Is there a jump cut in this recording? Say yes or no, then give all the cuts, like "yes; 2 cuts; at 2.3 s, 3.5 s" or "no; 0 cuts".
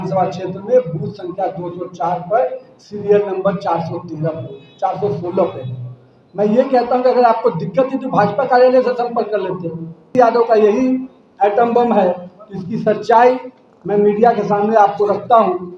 yes; 1 cut; at 10.1 s